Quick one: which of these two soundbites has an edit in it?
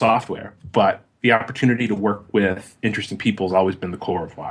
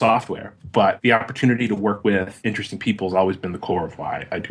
second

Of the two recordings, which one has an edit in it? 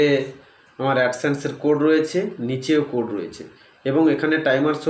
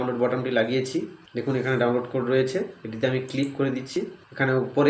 second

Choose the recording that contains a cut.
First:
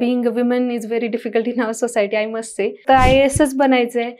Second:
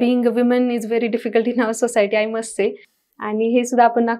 first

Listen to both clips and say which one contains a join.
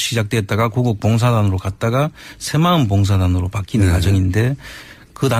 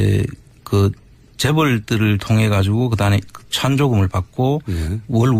second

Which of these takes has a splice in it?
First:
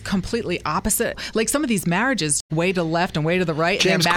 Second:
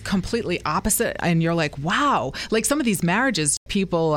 first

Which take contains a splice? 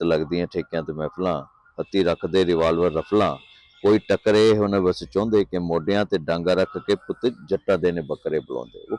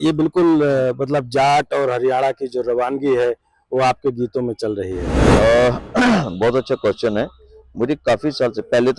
second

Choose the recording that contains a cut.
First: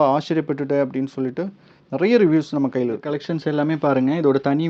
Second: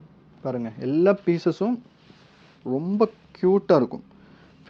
first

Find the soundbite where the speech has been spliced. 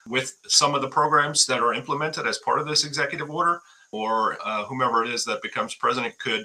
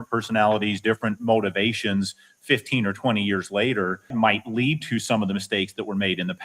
second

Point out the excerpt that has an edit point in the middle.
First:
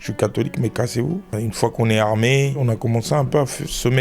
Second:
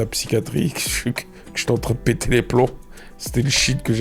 first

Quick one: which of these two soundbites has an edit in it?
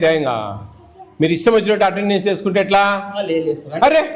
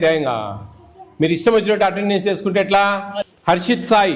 second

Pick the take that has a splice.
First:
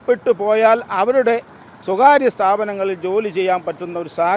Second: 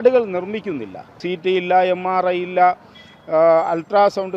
second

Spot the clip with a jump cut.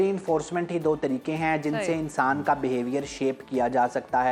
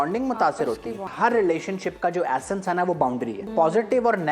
second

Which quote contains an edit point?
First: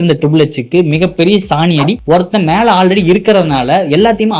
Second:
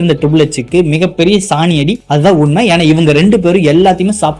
first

